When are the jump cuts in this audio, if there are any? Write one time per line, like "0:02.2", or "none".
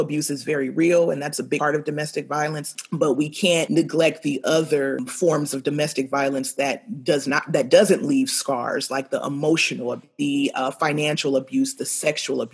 0:01.6
0:02.7
0:03.7
0:05.1
0:10.1